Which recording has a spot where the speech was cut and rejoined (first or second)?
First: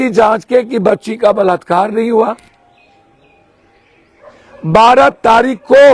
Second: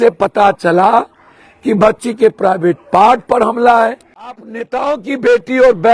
second